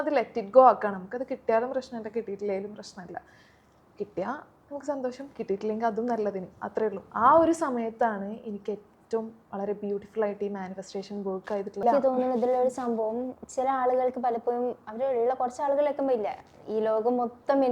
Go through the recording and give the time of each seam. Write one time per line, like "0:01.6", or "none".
0:11.8